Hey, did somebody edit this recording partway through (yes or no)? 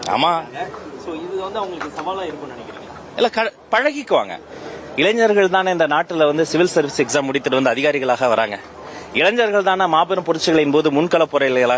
no